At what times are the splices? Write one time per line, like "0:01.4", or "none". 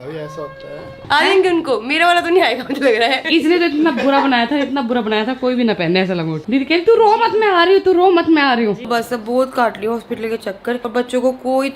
0:00.9
0:03.2
0:06.4
0:08.8
0:10.8